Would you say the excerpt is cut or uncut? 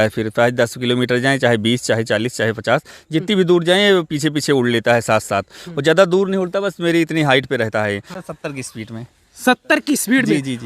cut